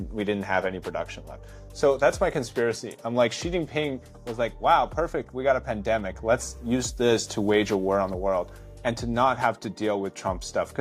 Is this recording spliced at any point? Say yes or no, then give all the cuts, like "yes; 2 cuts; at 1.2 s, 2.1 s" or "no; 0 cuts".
no; 0 cuts